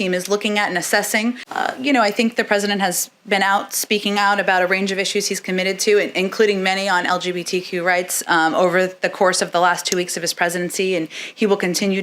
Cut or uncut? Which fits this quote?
cut